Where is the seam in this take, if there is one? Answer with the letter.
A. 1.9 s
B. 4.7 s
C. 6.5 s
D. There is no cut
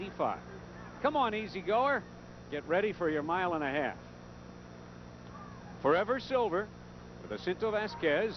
D